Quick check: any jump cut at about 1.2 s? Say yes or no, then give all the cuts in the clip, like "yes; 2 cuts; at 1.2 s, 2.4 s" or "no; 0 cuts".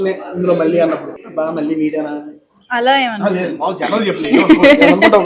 yes; 1 cut; at 1.2 s